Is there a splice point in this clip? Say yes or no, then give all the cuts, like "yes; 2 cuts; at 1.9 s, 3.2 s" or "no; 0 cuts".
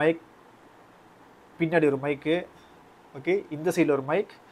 no; 0 cuts